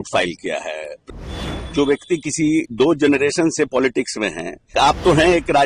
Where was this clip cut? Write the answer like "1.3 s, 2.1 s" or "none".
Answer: 1.1 s, 4.7 s